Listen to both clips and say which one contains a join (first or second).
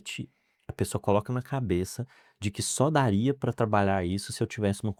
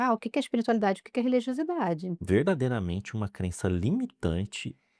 second